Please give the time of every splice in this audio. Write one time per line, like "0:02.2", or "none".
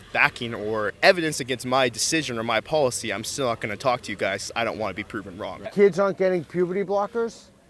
0:00.9
0:05.7